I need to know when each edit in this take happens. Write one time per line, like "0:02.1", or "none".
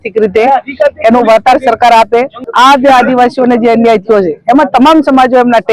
0:02.3